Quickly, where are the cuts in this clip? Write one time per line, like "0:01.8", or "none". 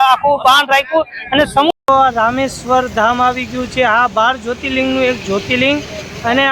0:01.8